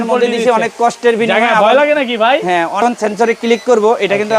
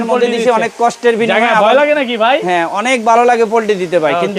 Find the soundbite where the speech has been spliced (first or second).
first